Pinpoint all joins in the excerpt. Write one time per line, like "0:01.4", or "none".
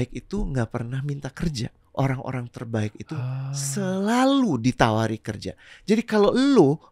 0:01.8